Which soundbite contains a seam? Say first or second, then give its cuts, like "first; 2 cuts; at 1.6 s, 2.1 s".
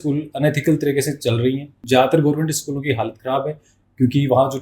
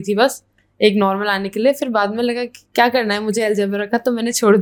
first; 1 cut; at 1.7 s